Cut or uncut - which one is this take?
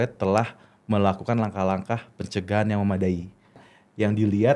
cut